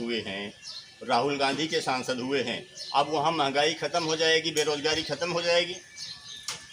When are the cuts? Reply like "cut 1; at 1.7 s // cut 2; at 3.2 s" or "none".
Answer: none